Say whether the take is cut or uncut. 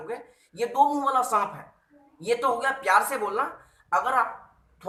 uncut